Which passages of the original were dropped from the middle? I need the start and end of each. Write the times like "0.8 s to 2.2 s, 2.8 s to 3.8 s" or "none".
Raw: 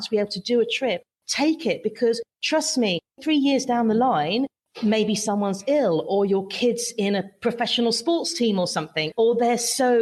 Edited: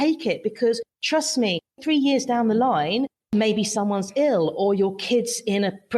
4.6 s to 4.7 s